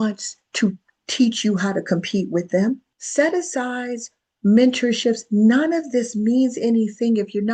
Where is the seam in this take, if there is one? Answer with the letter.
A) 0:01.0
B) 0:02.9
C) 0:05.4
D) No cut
B